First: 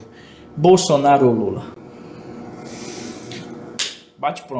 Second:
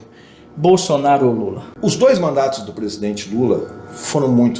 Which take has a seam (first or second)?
second